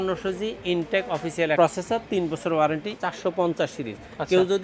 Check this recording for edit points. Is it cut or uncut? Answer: cut